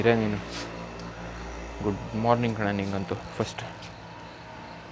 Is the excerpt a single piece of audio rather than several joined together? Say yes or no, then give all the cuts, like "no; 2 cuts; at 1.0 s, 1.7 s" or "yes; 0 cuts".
yes; 0 cuts